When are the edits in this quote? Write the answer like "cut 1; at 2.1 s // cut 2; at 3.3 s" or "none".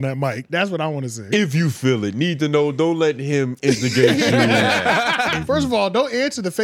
cut 1; at 5.4 s

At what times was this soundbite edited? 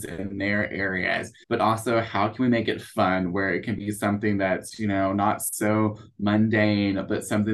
cut 1; at 1.3 s

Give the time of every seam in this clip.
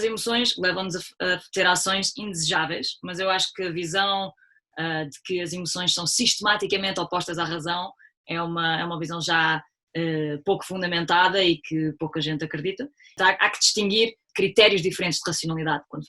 cut 1; at 13.1 s // cut 2; at 14.3 s

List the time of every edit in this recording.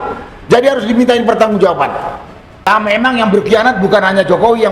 cut 1; at 2.7 s

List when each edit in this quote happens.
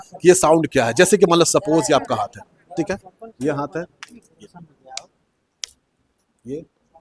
none

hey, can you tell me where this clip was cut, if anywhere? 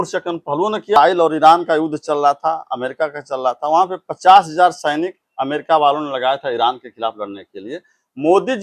cut 1; at 1.0 s

